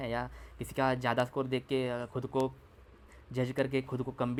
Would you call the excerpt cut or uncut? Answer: uncut